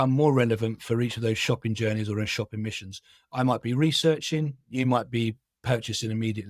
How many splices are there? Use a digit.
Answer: 0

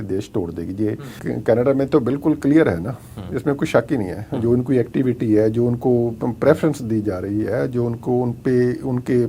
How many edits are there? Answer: 1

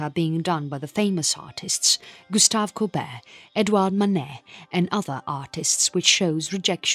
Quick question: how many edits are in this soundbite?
0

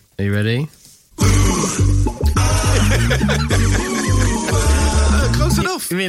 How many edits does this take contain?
0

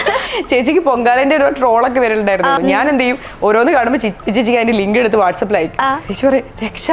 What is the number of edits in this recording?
2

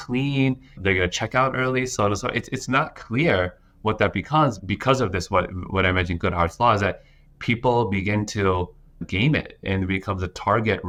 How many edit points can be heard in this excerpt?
0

